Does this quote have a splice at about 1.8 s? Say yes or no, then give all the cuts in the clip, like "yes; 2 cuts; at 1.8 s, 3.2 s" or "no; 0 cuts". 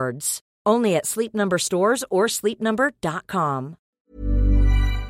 no; 1 cut; at 3.9 s